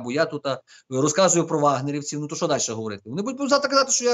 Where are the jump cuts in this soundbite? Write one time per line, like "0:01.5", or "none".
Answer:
none